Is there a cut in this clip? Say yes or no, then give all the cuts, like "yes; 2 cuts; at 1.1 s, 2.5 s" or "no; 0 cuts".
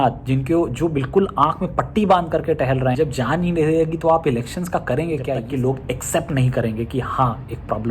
yes; 2 cuts; at 2.9 s, 5.4 s